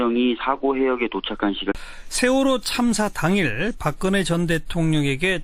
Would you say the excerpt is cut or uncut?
uncut